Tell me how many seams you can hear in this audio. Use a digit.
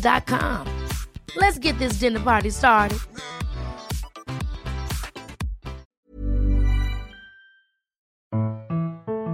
2